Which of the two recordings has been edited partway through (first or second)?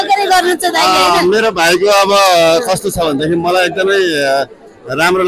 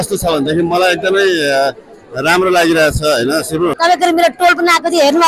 second